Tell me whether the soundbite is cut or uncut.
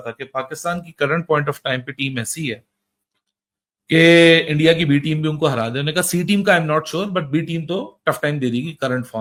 uncut